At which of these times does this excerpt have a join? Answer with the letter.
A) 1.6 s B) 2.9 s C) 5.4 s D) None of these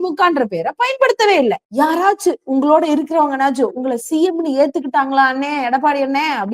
A